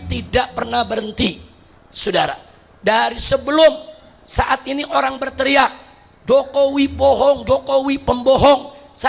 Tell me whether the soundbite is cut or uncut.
uncut